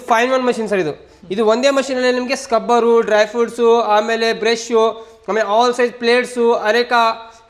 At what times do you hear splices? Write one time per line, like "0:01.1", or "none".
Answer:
none